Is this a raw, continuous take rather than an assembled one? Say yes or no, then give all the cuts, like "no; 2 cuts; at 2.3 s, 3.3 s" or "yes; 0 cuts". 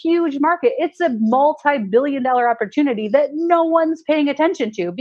yes; 0 cuts